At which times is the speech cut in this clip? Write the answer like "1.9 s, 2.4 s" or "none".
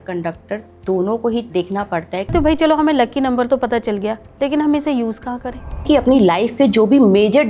2.3 s, 5.8 s